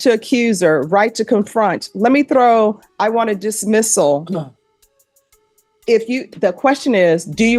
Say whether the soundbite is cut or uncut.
uncut